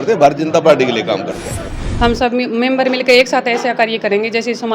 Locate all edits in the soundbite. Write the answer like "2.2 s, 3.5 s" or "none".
1.7 s